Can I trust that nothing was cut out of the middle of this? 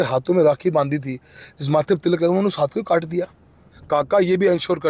no; 1 cut; at 3.7 s

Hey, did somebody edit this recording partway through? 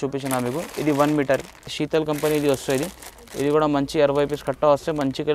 yes; 1 cut; at 1.8 s

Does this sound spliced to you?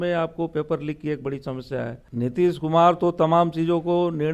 yes; 1 cut; at 2.0 s

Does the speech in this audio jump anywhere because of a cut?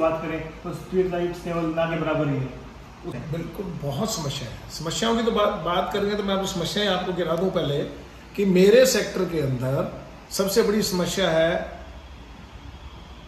yes; 1 cut; at 3.2 s

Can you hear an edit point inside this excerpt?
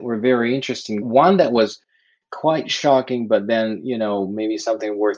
yes; 1 cut; at 1.0 s

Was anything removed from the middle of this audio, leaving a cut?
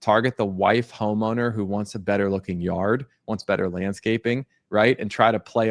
no; 0 cuts

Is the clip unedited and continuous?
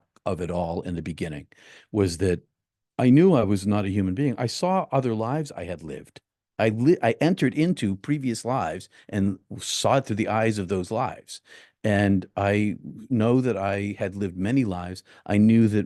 yes; 0 cuts

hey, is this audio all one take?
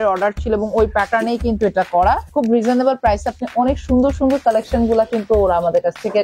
no; 1 cut; at 2.3 s

